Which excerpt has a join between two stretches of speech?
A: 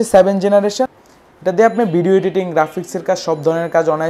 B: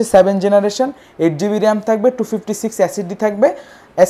A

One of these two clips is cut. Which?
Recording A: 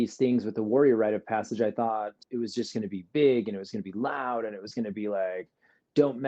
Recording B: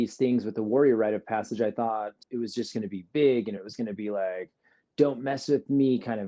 B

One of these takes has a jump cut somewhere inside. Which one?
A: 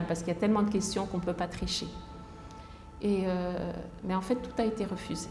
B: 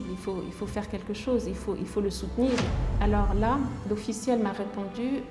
B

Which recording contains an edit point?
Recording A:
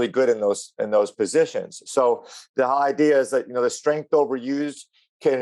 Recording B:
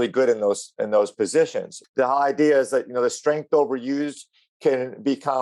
B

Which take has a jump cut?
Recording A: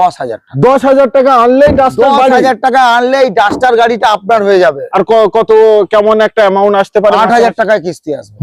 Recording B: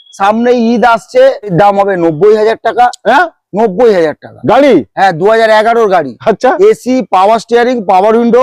B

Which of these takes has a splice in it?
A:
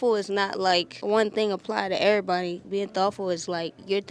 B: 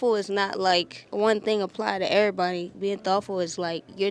A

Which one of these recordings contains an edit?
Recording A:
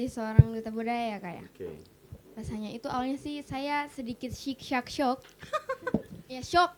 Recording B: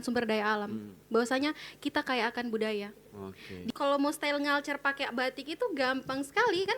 B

